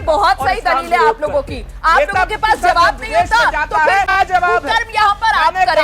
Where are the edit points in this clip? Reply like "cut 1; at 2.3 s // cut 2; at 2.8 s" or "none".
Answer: cut 1; at 1.8 s // cut 2; at 4.2 s